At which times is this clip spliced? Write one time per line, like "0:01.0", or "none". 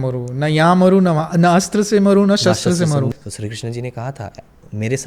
0:03.1